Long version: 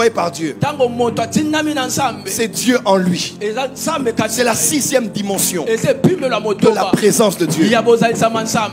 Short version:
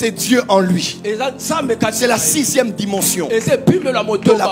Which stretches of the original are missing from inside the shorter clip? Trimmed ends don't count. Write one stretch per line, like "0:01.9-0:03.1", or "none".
none